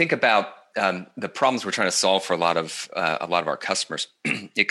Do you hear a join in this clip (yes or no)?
no